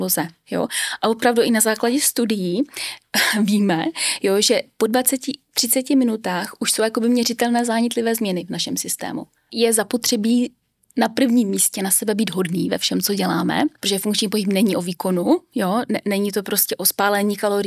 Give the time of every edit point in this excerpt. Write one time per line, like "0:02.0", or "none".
0:09.5
0:13.8